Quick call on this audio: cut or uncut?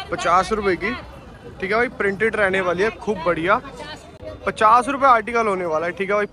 uncut